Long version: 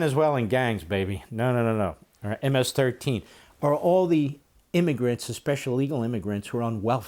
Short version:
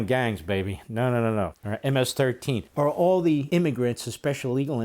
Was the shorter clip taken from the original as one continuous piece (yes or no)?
no